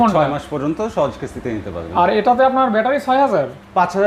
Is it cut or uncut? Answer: uncut